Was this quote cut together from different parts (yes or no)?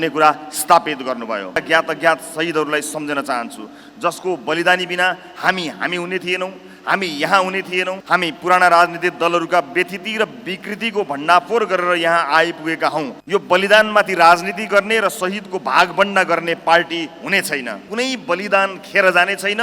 yes